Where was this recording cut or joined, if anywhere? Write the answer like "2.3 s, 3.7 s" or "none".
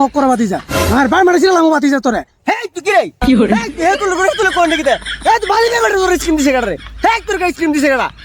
2.3 s